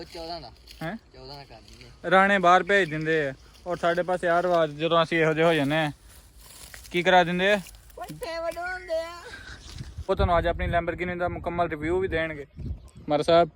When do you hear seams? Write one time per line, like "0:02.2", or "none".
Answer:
0:10.1